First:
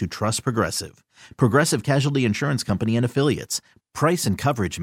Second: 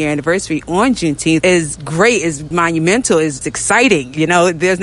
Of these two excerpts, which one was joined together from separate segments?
second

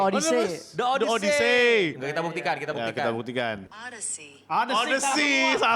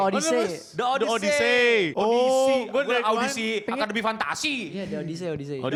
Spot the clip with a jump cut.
first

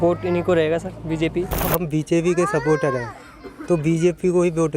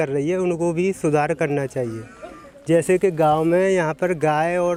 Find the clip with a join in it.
first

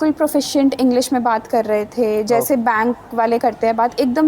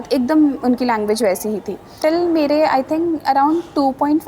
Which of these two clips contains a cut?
second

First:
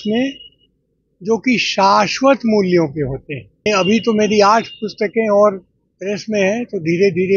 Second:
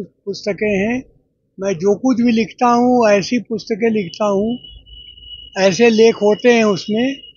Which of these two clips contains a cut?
first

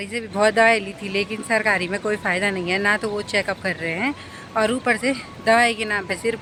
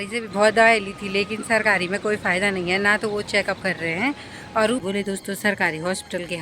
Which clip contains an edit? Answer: second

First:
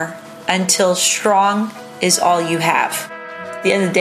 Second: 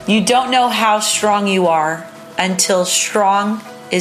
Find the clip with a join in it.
first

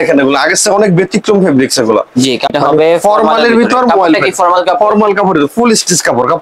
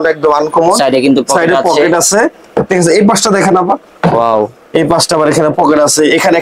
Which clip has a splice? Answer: first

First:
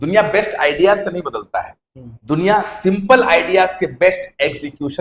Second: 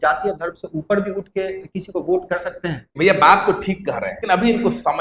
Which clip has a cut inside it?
second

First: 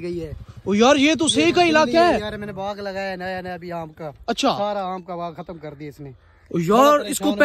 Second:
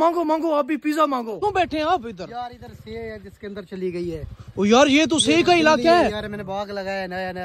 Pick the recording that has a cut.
second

